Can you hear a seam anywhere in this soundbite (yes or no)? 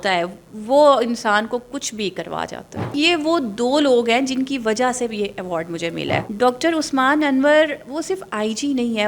yes